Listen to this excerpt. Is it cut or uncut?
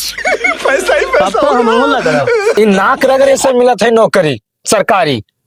cut